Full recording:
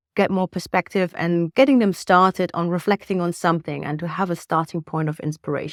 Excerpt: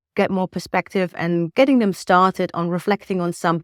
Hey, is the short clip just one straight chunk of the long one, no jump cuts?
yes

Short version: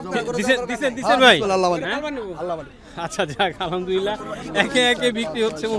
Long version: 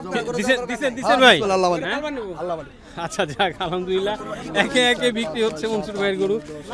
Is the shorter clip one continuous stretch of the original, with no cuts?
yes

